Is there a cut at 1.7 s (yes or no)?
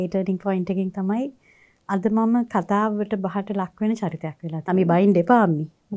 no